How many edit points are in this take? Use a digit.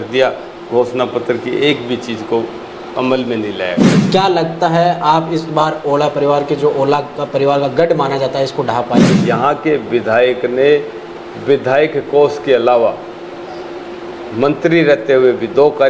2